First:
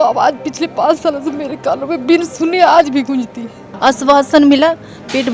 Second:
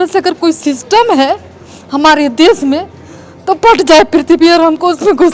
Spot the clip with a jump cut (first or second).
first